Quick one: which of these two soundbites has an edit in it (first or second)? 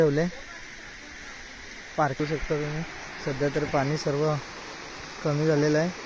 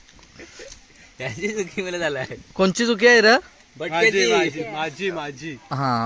first